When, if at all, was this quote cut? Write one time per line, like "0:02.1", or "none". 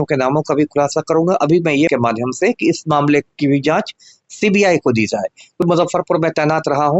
0:01.9
0:05.7